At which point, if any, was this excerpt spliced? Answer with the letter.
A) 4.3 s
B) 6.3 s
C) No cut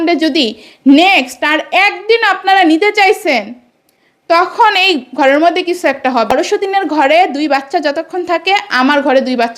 B